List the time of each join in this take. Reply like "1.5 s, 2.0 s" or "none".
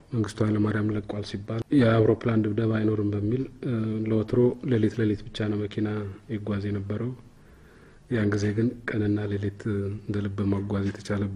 1.6 s